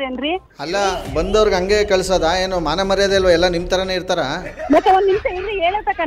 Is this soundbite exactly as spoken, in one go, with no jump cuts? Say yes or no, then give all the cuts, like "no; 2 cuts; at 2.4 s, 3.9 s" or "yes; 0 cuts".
yes; 0 cuts